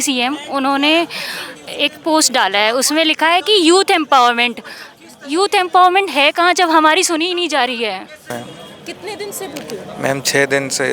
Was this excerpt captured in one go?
no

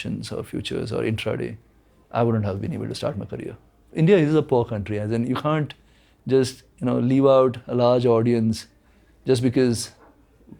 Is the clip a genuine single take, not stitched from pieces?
no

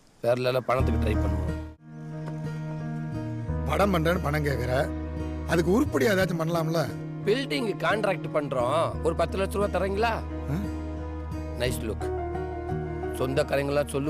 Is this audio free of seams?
no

